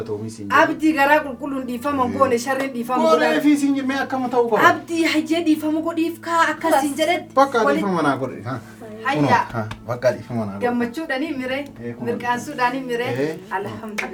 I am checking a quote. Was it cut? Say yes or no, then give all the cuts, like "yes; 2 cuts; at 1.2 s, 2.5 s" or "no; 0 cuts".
no; 0 cuts